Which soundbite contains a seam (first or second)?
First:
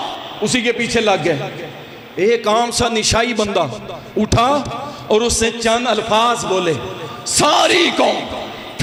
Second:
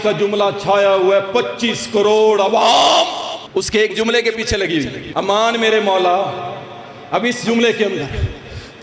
second